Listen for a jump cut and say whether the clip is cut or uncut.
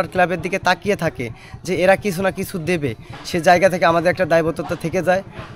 uncut